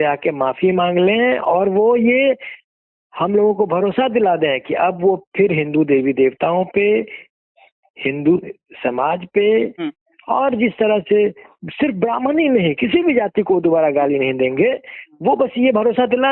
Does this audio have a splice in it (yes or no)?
no